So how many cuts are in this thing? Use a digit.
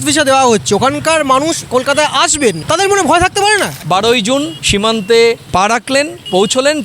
2